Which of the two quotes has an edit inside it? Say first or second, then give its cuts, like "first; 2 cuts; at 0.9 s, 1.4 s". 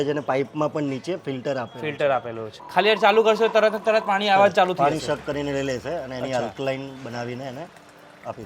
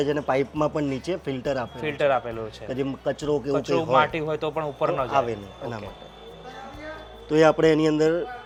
first; 1 cut; at 2.6 s